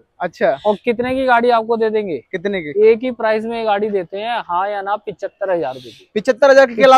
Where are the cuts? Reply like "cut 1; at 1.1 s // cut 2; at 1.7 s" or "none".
none